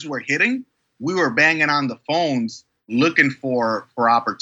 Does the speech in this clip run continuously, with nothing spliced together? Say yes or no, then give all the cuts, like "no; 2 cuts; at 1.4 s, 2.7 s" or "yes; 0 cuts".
yes; 0 cuts